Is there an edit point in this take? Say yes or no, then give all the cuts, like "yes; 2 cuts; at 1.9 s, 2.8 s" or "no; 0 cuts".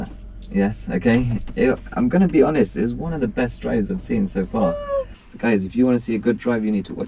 yes; 2 cuts; at 1.4 s, 5.1 s